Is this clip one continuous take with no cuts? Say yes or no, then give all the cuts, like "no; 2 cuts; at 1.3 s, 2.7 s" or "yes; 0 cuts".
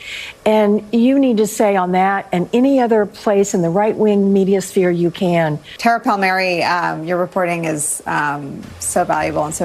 no; 1 cut; at 5.7 s